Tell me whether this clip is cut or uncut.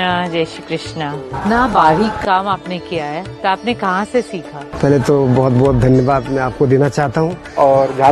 uncut